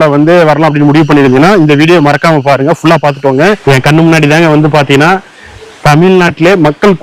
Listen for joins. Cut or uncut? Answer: cut